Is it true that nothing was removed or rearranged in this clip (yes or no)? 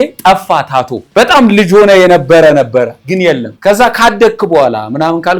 no